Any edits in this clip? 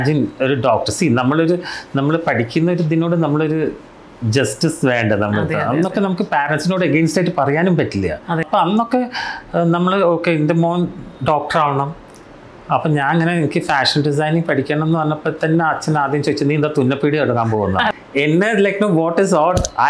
yes; 2 cuts; at 8.5 s, 17.9 s

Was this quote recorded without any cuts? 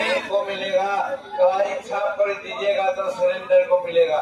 yes; 0 cuts

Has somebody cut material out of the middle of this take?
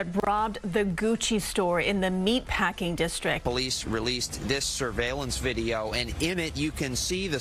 no; 0 cuts

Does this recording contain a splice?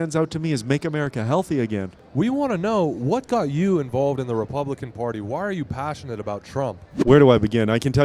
yes; 2 cuts; at 2.0 s, 6.9 s

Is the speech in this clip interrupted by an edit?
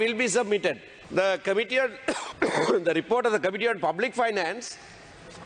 yes; 2 cuts; at 0.9 s, 2.3 s

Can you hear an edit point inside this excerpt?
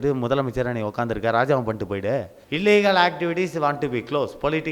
yes; 1 cut; at 2.4 s

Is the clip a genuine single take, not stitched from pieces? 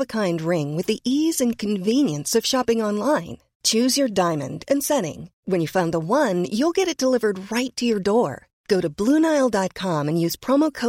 yes; 0 cuts

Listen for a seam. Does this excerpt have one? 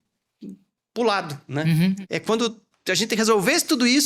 yes; 1 cut; at 2.0 s

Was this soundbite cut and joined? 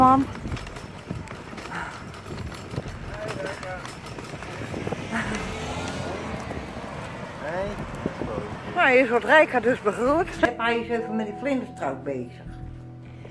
yes; 1 cut; at 10.5 s

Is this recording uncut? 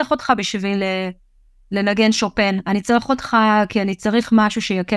yes; 0 cuts

